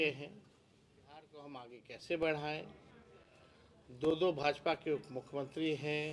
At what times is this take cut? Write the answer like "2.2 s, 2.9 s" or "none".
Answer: 1.1 s